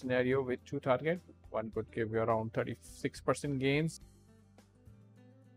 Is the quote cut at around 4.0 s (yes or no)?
yes